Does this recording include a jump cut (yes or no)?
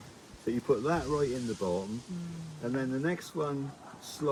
no